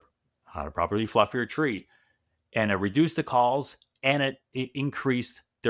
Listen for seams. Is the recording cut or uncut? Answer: uncut